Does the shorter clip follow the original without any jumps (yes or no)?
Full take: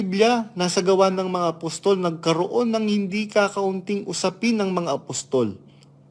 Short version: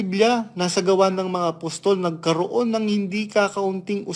yes